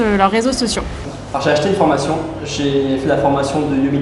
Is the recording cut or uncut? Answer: cut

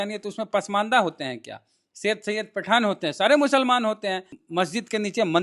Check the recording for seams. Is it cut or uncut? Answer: cut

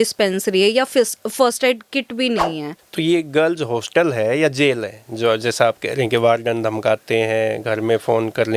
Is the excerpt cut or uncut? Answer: cut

